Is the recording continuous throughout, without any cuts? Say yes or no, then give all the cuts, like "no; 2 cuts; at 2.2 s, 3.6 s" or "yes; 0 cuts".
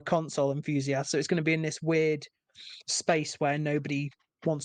yes; 0 cuts